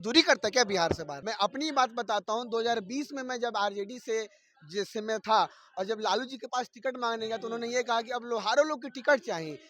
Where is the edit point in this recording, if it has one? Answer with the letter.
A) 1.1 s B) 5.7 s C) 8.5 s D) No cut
A